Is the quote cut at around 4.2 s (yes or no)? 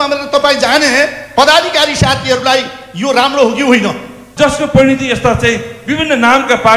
yes